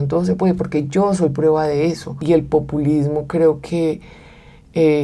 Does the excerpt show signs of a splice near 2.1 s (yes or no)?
yes